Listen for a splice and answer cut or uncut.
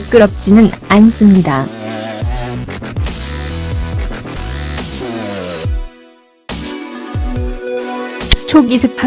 uncut